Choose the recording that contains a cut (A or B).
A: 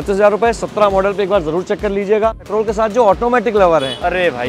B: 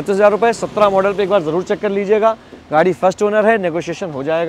A